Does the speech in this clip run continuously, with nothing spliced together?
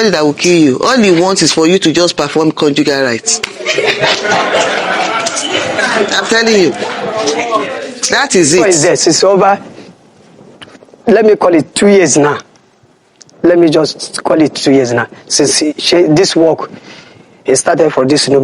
no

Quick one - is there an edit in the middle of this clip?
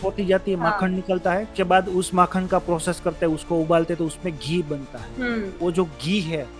yes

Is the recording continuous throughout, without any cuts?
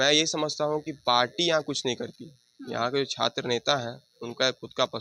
yes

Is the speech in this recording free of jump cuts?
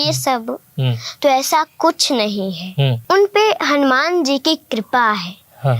no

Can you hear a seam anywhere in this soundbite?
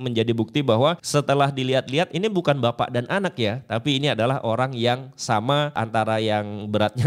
yes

